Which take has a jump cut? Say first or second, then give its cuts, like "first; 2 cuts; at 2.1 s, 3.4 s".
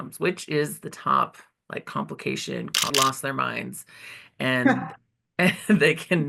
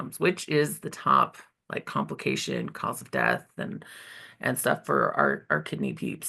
first; 1 cut; at 2.9 s